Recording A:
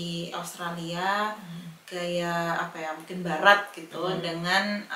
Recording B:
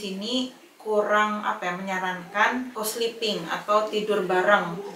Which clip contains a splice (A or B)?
B